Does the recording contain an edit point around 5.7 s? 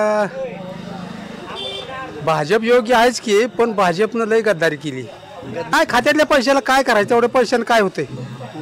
yes; 1 cut; at 5.7 s

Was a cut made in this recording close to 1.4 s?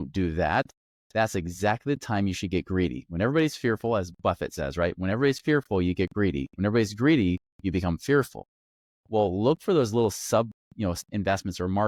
no; 0 cuts

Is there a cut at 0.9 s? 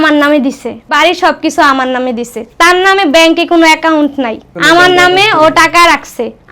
yes; 1 cut; at 0.9 s

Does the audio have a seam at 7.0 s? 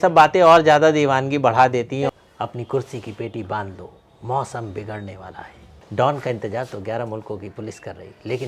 no; 2 cuts; at 2.1 s, 5.6 s

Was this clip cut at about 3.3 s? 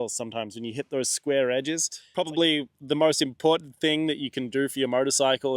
no; 1 cut; at 2.0 s

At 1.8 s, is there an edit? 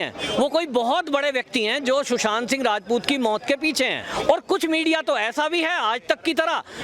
no; 1 cut; at 4.0 s

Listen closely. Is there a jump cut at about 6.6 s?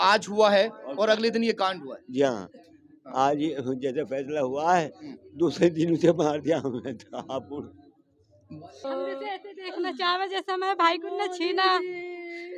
no; 1 cut; at 8.8 s

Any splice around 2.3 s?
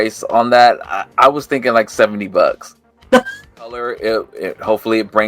no; 1 cut; at 3.8 s

